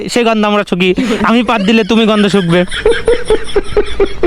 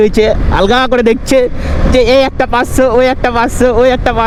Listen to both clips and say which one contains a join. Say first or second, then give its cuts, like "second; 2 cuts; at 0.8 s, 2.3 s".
first; 1 cut; at 2.7 s